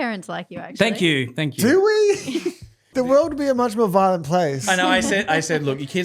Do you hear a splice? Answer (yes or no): yes